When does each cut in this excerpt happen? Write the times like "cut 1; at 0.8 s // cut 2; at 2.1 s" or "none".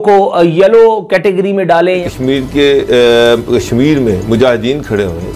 cut 1; at 2.1 s